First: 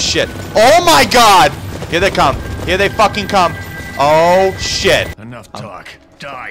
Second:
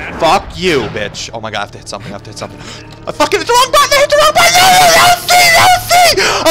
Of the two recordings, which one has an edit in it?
first; 1 cut; at 5.2 s

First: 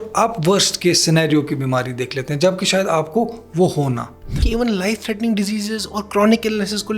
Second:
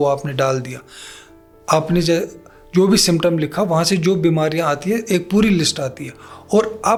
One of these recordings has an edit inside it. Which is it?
first; 1 cut; at 4.4 s

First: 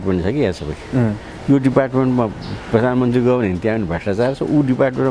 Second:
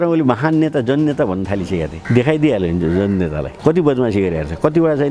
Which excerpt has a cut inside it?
second; 2 cuts; at 2.0 s, 3.5 s

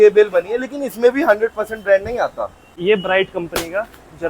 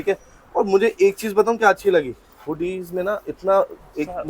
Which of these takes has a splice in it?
first; 1 cut; at 2.7 s

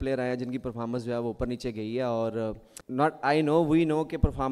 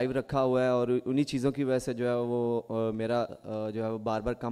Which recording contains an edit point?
first; 1 cut; at 2.7 s

